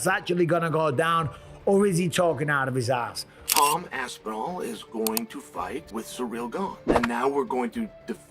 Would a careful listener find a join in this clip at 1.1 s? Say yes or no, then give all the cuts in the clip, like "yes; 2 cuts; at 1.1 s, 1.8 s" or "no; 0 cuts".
no; 3 cuts; at 3.2 s, 5.9 s, 6.8 s